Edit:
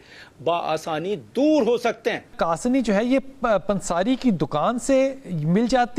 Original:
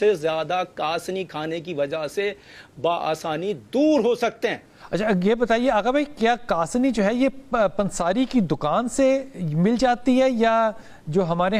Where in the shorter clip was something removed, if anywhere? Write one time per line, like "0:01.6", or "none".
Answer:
0:02.3